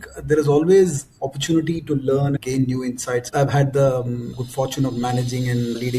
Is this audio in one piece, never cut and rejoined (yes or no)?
no